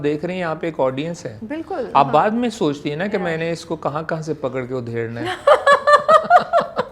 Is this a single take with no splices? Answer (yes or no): yes